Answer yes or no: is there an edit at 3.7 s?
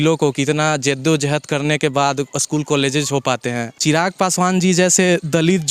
yes